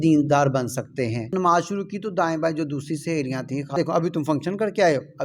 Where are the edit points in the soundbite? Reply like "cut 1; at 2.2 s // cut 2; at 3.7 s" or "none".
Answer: cut 1; at 1.3 s // cut 2; at 3.8 s

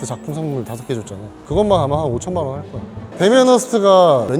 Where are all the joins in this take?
cut 1; at 1.3 s // cut 2; at 3.0 s

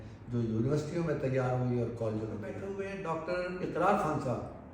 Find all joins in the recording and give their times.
cut 1; at 2.6 s

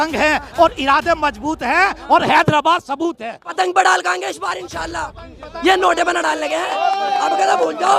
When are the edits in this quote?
cut 1; at 3.5 s

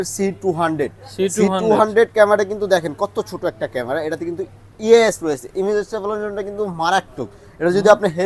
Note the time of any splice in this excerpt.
none

